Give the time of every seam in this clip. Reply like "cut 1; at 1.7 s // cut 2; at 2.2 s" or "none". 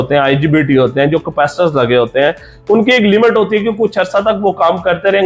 none

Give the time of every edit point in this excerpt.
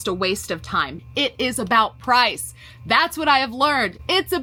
none

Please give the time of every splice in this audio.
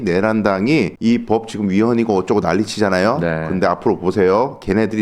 cut 1; at 0.9 s

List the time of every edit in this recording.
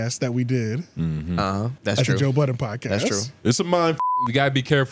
cut 1; at 1.7 s // cut 2; at 4.0 s

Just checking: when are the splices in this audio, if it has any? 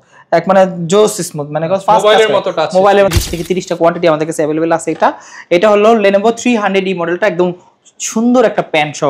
cut 1; at 3.1 s

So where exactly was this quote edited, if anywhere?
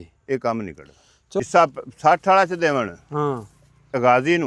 cut 1; at 1.4 s

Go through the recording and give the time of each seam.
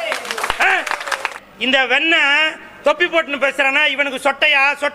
cut 1; at 1.4 s

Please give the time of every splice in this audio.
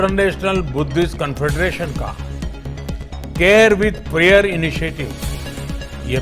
cut 1; at 2.0 s // cut 2; at 3.4 s

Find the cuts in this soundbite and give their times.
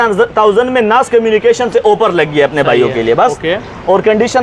none

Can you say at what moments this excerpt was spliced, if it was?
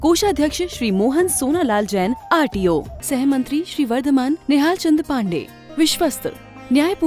none

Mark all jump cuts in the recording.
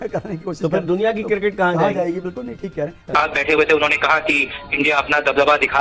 cut 1; at 3.0 s

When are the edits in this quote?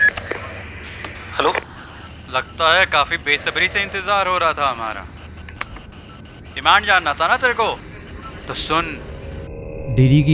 cut 1; at 9.4 s

